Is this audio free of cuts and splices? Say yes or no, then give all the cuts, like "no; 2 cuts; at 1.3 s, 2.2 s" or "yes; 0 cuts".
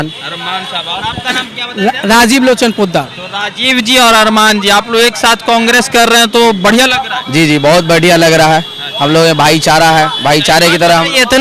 yes; 0 cuts